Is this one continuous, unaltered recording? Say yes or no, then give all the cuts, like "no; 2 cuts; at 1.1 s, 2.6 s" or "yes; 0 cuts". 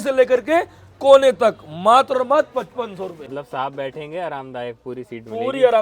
no; 1 cut; at 3.3 s